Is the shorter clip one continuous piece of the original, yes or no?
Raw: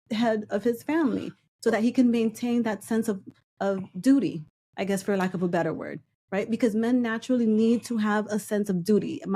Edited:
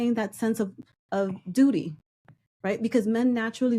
no